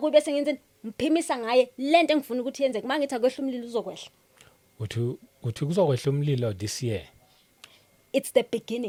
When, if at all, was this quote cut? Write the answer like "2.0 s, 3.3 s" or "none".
none